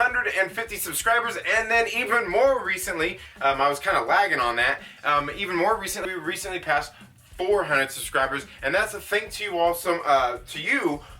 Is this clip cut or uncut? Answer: cut